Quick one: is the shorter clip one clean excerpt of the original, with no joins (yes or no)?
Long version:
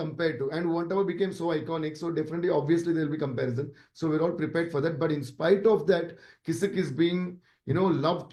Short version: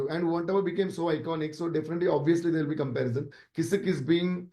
no